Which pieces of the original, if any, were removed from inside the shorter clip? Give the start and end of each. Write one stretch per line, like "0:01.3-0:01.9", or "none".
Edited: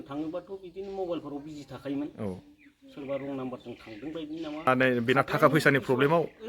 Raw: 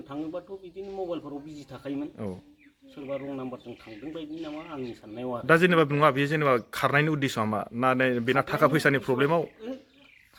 0:04.7-0:07.9